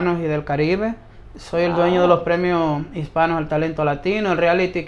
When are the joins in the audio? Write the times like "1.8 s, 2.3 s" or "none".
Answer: none